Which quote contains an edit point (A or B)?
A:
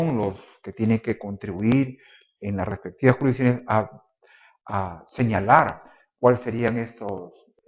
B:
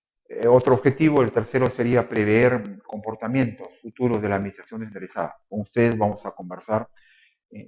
B